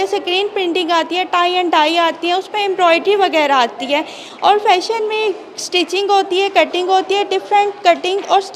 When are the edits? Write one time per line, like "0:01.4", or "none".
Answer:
none